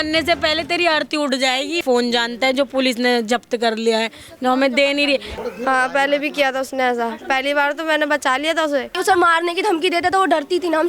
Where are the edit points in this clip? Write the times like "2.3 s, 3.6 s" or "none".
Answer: 1.8 s, 5.3 s, 8.9 s

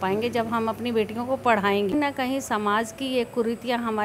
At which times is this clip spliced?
1.9 s

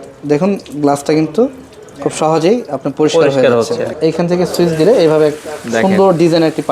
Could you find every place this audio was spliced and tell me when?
4.0 s

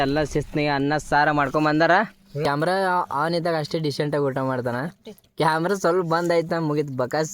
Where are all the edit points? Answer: 2.4 s

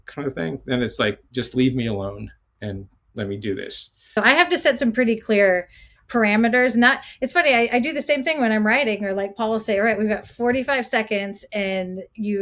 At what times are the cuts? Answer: 4.2 s

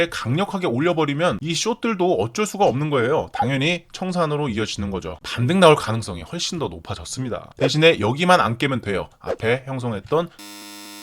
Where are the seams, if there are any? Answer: 7.4 s

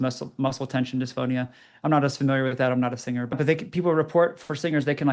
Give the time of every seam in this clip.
3.3 s

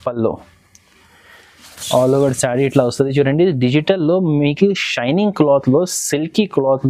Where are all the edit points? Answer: none

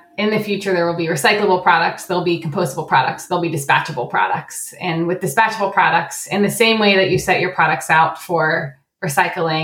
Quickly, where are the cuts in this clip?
none

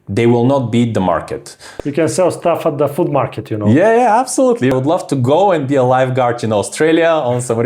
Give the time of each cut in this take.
1.6 s, 4.7 s

